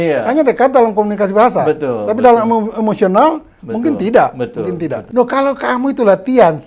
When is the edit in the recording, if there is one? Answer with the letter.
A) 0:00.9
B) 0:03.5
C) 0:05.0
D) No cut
C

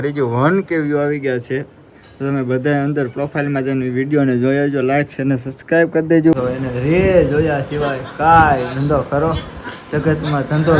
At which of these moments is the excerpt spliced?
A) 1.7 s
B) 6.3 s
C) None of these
B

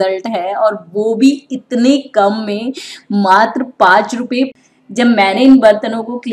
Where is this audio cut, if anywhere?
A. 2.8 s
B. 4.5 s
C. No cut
B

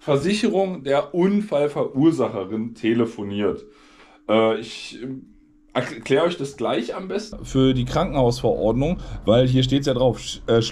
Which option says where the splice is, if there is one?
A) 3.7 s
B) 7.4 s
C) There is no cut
B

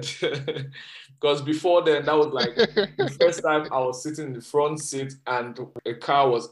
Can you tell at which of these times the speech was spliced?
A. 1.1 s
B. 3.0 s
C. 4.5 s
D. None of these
D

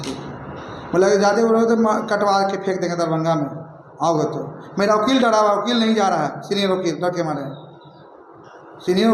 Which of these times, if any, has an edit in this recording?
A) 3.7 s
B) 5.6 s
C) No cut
C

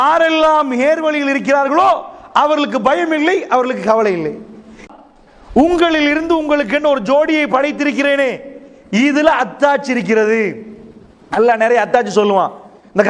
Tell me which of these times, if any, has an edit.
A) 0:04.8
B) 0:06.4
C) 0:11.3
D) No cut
A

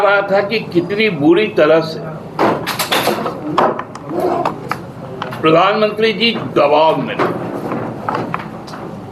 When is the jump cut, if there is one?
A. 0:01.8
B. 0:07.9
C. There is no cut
C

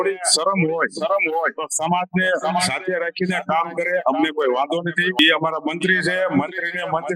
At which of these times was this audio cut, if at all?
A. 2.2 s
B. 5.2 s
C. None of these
B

